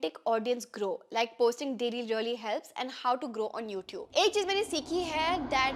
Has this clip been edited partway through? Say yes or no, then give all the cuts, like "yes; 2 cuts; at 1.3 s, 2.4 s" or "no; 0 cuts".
no; 0 cuts